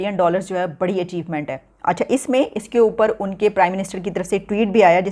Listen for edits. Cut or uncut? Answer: uncut